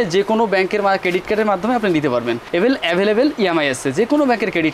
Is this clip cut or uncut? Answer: uncut